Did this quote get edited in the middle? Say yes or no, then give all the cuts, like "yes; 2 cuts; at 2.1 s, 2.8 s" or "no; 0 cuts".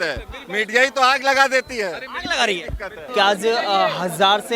yes; 1 cut; at 3.0 s